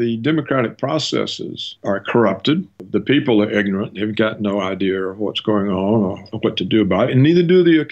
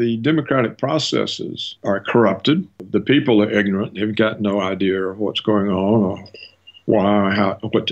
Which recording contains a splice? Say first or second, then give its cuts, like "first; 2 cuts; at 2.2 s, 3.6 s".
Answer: first; 1 cut; at 6.3 s